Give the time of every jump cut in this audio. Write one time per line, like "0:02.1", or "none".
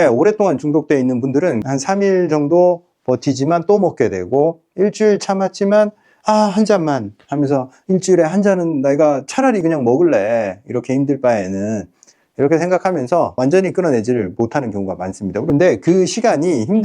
0:01.6
0:15.4

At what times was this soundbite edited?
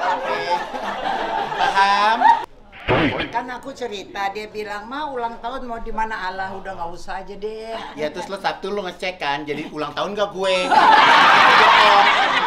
0:02.5
0:07.9

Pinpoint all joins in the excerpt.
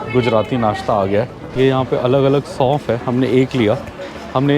0:01.4

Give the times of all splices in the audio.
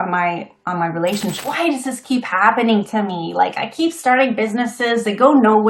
0:01.4

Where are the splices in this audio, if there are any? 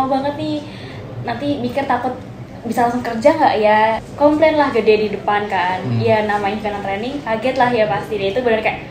0:04.1

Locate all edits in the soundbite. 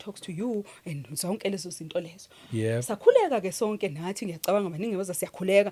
none

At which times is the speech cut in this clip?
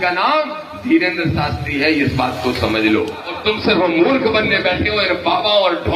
0:03.3

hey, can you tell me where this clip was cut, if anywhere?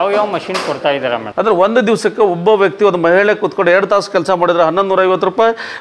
0:01.2

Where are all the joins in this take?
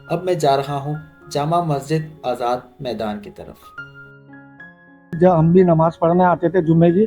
0:05.2

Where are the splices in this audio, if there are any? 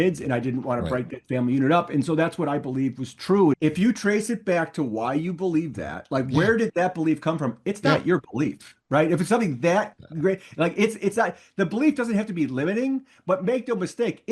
0:03.5

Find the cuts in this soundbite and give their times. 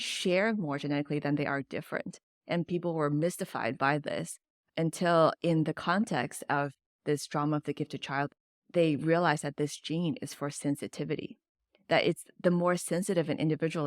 0:08.4

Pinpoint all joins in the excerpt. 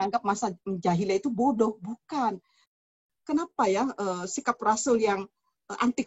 0:02.9

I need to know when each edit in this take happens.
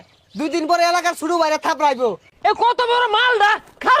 0:02.3

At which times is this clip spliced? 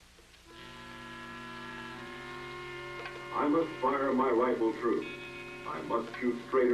0:03.3

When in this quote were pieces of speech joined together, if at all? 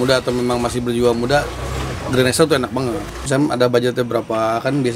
0:03.2

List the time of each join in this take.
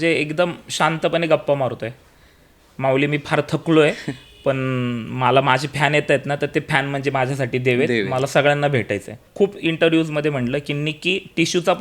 0:09.2

